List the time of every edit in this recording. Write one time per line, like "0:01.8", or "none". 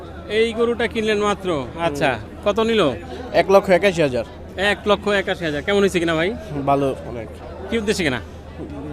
none